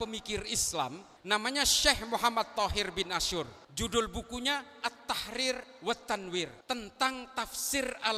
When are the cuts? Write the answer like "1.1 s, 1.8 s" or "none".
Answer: 1.1 s, 3.6 s, 6.6 s